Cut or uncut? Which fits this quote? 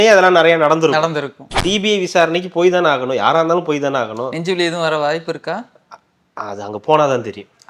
cut